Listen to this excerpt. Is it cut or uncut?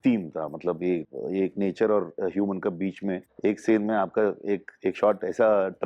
cut